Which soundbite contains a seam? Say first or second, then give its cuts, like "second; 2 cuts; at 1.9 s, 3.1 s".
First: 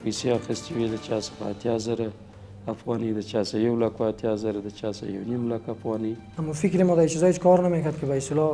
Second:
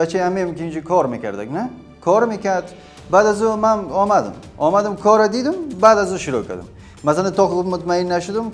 first; 1 cut; at 6.3 s